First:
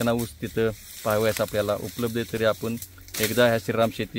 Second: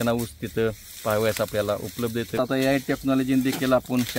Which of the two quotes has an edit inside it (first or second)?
second